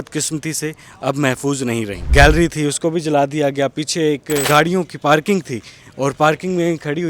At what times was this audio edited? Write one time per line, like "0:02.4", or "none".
0:02.1
0:04.4